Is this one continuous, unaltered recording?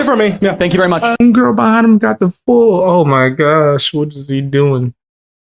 no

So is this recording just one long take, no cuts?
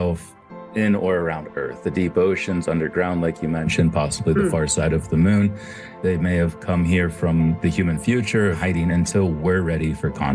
no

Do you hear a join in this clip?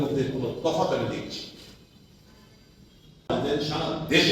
yes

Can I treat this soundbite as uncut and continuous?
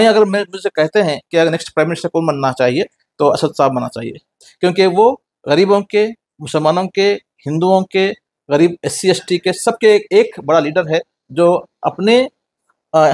yes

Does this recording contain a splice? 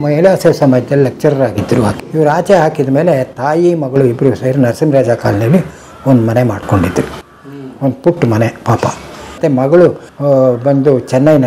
yes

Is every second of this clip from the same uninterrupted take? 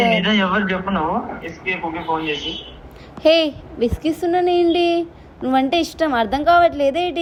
yes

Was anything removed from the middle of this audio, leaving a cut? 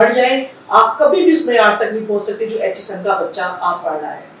no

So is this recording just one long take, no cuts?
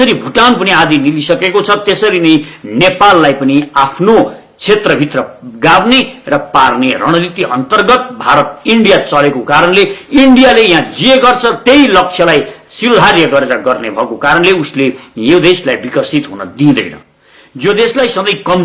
yes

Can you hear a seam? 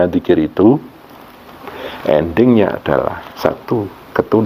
no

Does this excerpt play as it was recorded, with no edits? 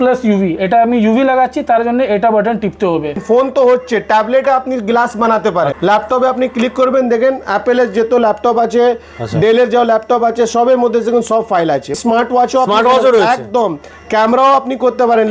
no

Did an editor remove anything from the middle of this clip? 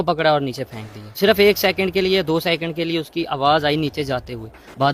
yes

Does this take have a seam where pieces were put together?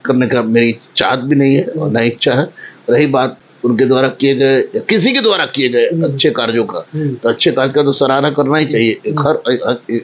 no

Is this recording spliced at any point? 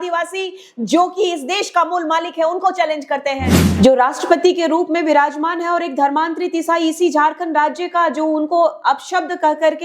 yes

